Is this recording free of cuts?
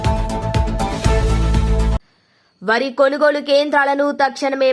yes; 0 cuts

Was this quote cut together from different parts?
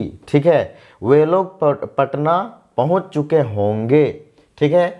no; 0 cuts

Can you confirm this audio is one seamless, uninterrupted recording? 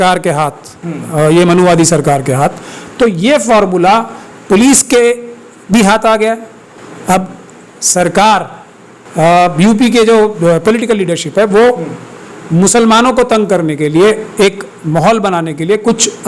yes; 0 cuts

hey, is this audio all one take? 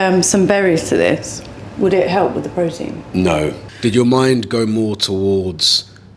no; 1 cut; at 3.7 s

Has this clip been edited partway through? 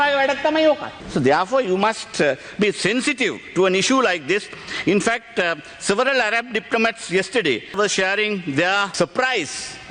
no; 0 cuts

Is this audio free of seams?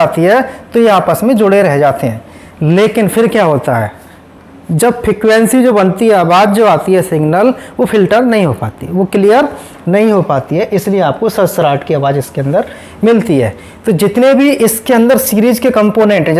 yes; 0 cuts

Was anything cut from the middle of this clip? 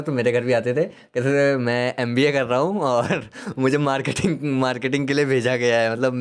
no; 0 cuts

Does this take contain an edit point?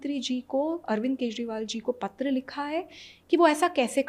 no; 0 cuts

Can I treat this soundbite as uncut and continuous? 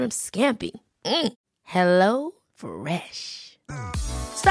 yes; 0 cuts

